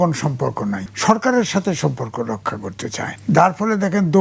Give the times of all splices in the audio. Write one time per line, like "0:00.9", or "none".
0:00.9
0:03.1